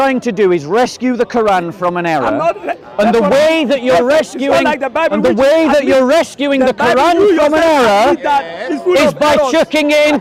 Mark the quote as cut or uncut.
uncut